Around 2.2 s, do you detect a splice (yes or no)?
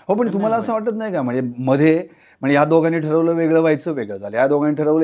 no